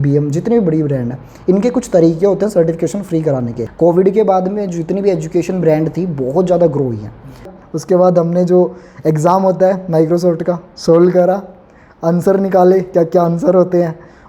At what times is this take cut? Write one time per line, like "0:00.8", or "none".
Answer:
0:03.6
0:07.5